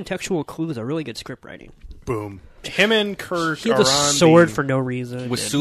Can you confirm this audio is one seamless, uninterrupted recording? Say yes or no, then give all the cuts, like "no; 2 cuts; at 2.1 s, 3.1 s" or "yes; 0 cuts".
no; 1 cut; at 2.7 s